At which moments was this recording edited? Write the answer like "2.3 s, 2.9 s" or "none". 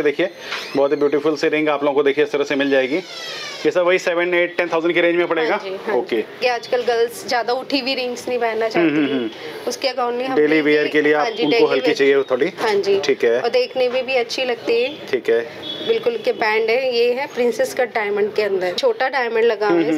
6.4 s, 18.7 s